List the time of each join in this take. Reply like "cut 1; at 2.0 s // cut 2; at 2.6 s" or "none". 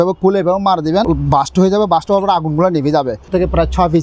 cut 1; at 1.0 s // cut 2; at 3.3 s